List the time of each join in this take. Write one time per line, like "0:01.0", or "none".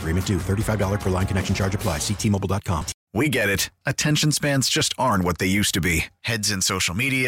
0:02.9